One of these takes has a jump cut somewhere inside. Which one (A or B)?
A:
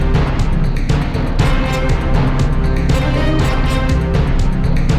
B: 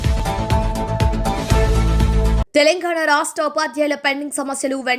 B